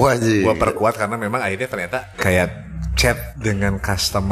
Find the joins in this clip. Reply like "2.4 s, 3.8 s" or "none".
2.1 s, 3.3 s